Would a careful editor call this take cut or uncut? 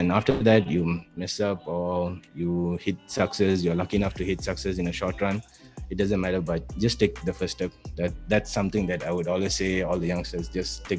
uncut